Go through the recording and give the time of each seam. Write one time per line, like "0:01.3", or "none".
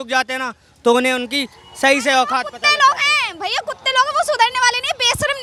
none

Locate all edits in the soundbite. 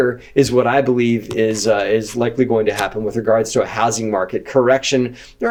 none

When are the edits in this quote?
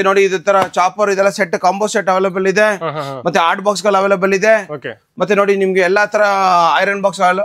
none

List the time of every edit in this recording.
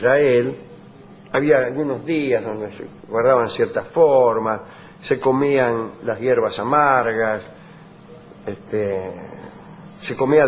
0:09.2

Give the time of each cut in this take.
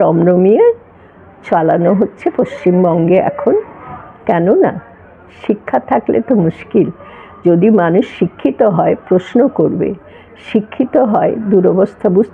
none

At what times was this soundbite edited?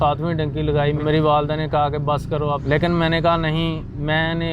0:01.0
0:02.6

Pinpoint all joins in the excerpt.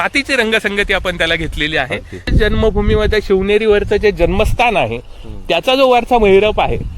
0:02.3

